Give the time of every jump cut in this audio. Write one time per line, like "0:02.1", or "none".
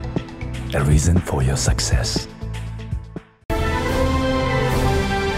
0:03.3